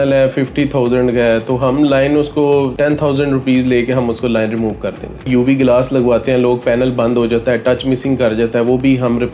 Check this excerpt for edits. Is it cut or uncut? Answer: cut